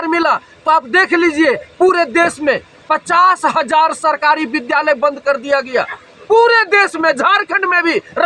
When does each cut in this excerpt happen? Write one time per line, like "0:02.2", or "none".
none